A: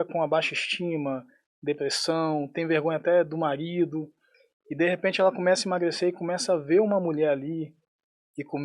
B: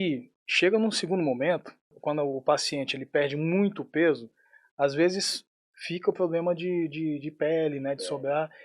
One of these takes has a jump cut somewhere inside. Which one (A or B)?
B